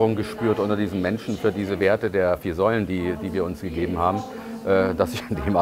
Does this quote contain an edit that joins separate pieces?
no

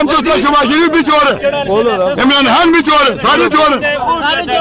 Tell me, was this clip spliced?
no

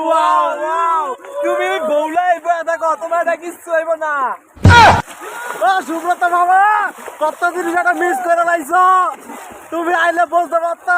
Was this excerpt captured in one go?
yes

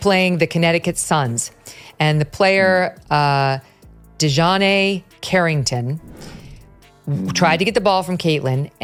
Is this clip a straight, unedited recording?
yes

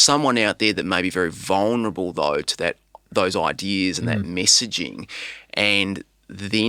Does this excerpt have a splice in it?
no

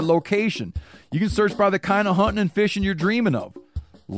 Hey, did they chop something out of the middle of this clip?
no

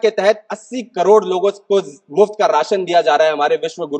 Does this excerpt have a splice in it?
no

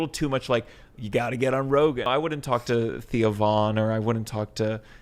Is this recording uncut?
no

